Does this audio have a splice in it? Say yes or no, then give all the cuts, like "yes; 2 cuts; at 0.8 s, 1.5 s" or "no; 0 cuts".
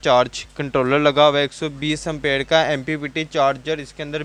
no; 0 cuts